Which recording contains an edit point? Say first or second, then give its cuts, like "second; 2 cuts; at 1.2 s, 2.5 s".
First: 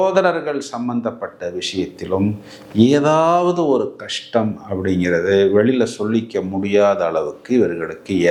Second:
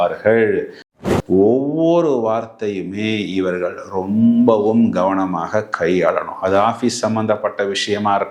second; 1 cut; at 0.9 s